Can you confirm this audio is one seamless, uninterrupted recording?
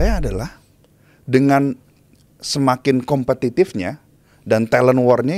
yes; 0 cuts

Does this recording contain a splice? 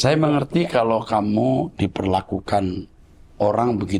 no; 0 cuts

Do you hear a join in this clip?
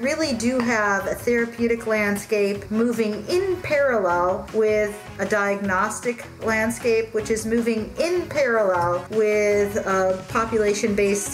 no; 0 cuts

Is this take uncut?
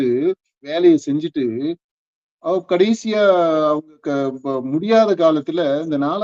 yes; 0 cuts

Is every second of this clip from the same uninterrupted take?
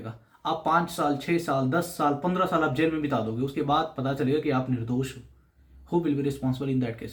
yes; 0 cuts

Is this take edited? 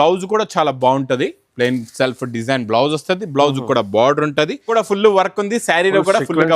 yes; 1 cut; at 4.7 s

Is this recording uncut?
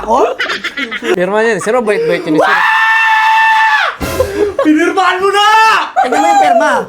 no; 2 cuts; at 1.1 s, 5.9 s

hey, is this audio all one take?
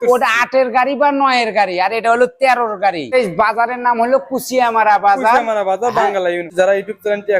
no; 2 cuts; at 3.1 s, 6.5 s

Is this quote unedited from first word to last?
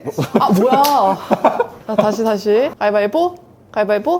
no; 1 cut; at 1.8 s

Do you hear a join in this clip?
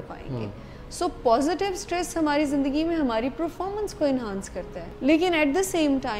yes; 1 cut; at 4.8 s

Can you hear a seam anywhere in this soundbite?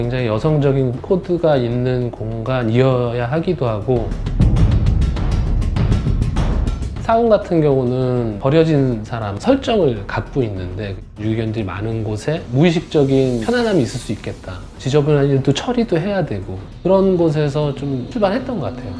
no; 0 cuts

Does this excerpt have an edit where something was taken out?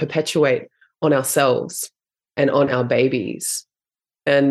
yes; 1 cut; at 2.3 s

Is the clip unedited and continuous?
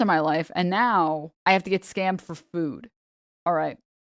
no; 1 cut; at 1.3 s

